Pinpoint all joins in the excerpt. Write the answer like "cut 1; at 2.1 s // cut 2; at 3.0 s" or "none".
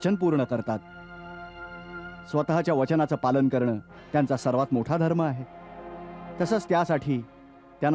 none